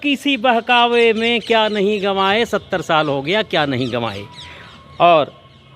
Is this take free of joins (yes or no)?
yes